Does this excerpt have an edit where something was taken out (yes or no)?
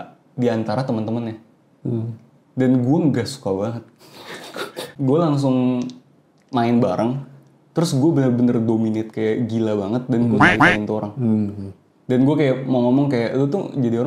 yes